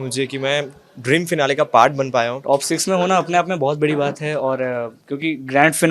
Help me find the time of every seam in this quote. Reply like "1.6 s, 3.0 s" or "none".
2.4 s